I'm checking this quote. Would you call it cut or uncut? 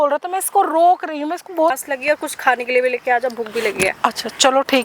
cut